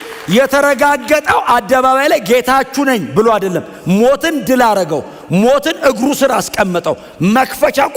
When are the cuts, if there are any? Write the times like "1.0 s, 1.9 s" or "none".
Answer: none